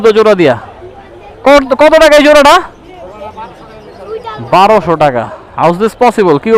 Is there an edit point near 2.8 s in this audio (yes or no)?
no